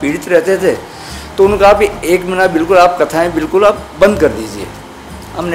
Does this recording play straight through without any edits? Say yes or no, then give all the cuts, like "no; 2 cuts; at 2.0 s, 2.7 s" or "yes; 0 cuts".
yes; 0 cuts